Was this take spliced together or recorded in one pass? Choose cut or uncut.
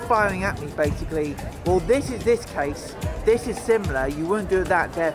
uncut